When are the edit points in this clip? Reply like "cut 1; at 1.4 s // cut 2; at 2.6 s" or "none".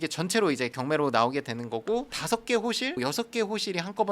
cut 1; at 2.2 s